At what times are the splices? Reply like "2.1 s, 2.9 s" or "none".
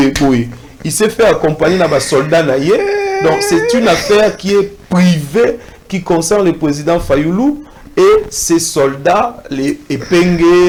none